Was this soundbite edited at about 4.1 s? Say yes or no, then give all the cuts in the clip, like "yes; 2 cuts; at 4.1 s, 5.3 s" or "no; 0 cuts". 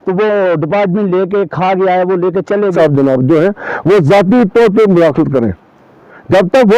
no; 1 cut; at 2.7 s